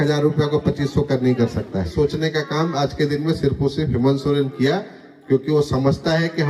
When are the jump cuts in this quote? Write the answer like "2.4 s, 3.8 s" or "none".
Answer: 1.9 s